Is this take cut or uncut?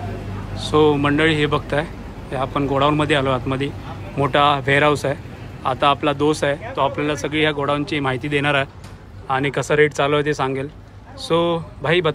uncut